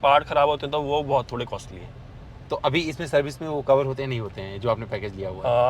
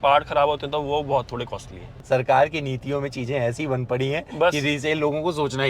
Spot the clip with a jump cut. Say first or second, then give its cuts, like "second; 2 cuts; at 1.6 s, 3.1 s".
second; 1 cut; at 1.9 s